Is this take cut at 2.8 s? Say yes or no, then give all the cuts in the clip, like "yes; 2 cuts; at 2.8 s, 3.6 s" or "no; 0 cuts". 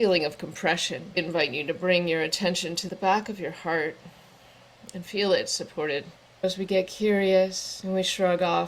yes; 4 cuts; at 1.2 s, 2.8 s, 6.2 s, 7.7 s